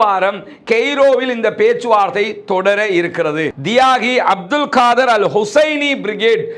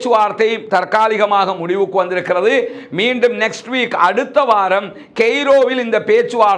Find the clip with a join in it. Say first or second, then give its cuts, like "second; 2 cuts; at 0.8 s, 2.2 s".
first; 1 cut; at 3.6 s